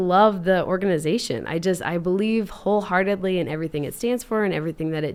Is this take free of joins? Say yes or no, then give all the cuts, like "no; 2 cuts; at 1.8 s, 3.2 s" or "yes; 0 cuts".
yes; 0 cuts